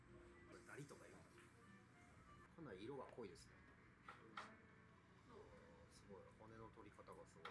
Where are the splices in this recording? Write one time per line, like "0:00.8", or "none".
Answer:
none